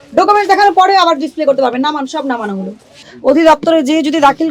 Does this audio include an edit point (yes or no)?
yes